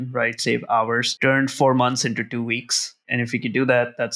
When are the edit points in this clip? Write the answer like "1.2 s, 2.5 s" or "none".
1.1 s, 3.0 s